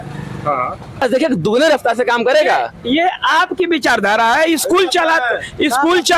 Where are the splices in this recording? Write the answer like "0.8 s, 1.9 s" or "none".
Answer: 1.0 s